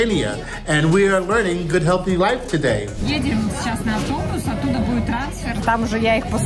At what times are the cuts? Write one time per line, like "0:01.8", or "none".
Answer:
0:03.0

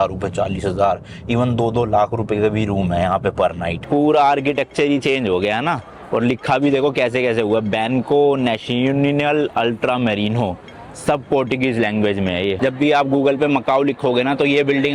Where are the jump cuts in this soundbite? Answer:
0:03.7
0:12.5

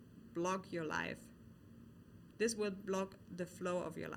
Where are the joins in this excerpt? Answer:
none

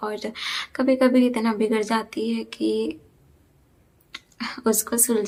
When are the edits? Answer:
none

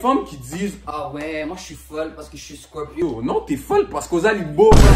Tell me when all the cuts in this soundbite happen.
none

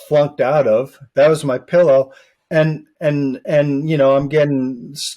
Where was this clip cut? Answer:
0:01.0

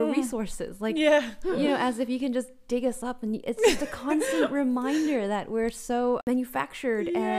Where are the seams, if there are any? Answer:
0:06.2

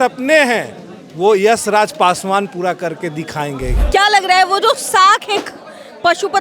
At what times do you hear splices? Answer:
0:03.7

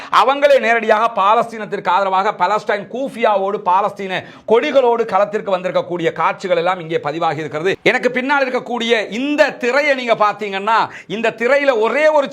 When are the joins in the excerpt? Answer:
0:07.8

